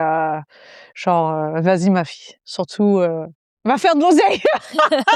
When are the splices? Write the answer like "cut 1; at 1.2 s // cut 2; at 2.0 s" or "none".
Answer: none